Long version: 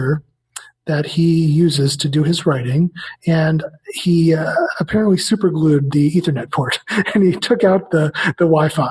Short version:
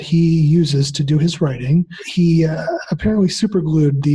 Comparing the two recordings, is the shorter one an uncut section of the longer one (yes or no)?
no